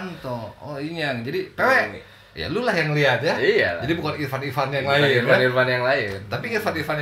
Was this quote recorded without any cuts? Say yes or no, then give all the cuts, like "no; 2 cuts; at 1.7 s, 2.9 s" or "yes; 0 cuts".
yes; 0 cuts